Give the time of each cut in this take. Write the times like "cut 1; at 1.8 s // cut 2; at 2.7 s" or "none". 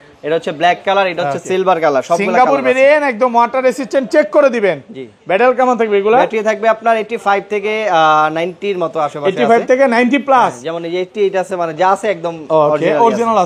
none